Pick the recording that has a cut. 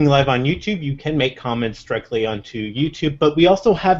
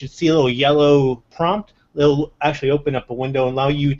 second; 1 cut; at 1.6 s

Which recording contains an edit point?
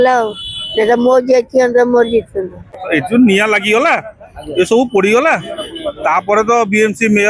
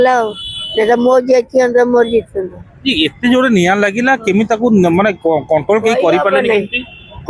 first; 1 cut; at 2.8 s

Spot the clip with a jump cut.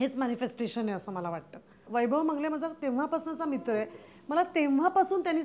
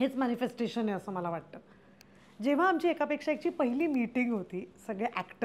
first; 1 cut; at 1.8 s

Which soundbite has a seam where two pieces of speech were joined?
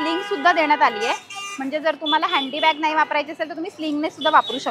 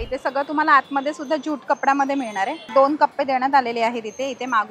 second; 1 cut; at 2.7 s

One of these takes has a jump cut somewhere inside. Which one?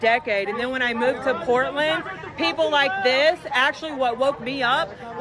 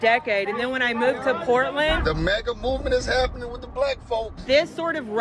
second; 2 cuts; at 2.0 s, 4.4 s

